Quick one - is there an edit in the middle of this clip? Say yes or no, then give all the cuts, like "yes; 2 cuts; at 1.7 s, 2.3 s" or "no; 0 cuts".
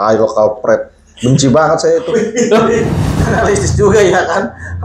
yes; 1 cut; at 3.1 s